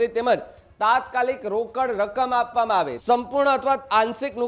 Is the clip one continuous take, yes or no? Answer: no